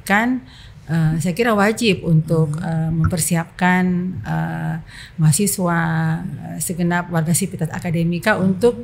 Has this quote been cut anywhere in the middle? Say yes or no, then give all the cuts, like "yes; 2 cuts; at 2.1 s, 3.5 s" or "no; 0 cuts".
no; 0 cuts